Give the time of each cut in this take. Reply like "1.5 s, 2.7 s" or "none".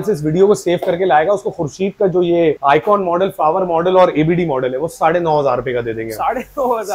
none